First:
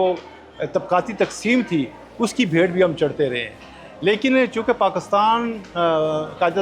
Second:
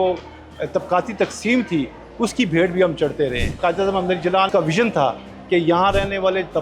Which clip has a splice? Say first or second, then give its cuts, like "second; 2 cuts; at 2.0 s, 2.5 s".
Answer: second; 2 cuts; at 3.5 s, 4.5 s